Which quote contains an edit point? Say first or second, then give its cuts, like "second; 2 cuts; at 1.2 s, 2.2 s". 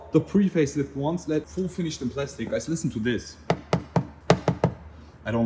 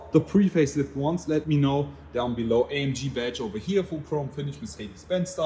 first; 2 cuts; at 1.5 s, 4.1 s